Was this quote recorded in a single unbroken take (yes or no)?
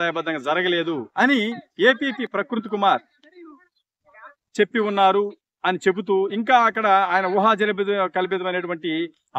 no